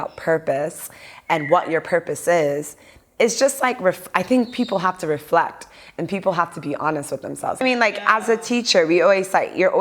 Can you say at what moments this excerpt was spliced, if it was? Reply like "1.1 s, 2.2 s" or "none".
7.6 s